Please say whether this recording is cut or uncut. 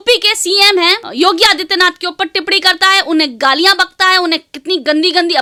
uncut